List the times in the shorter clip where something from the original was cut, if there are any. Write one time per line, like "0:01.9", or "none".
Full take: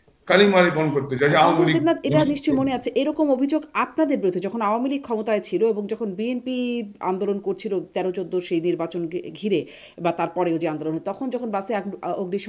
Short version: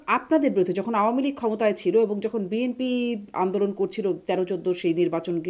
none